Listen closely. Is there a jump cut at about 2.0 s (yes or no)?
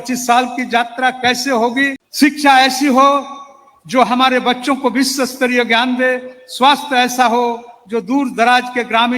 yes